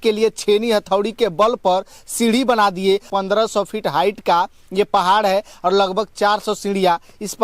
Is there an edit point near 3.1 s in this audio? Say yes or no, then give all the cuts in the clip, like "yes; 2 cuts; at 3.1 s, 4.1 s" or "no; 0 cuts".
yes; 1 cut; at 3.1 s